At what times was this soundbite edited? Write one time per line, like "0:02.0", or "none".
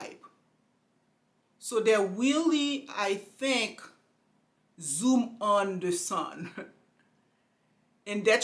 none